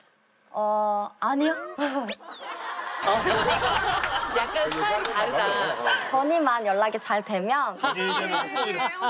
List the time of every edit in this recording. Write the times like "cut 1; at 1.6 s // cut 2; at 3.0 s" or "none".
cut 1; at 7.8 s